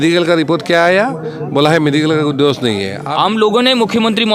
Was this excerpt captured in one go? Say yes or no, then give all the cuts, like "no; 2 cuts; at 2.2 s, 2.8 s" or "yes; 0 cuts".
no; 1 cut; at 2.9 s